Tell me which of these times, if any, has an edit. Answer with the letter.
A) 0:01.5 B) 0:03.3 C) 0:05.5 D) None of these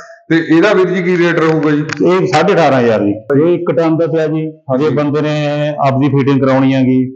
B